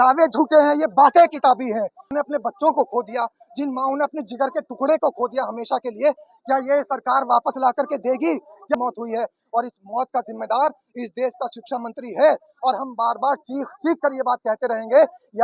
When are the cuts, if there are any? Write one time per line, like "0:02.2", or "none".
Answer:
0:02.1
0:08.8